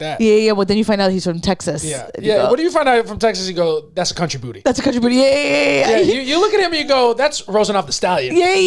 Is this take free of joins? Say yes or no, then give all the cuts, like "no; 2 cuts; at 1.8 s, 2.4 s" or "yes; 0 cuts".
yes; 0 cuts